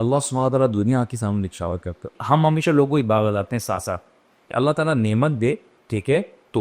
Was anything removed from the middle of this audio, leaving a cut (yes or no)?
yes